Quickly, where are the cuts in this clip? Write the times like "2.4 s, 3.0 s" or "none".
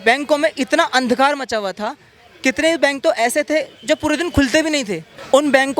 none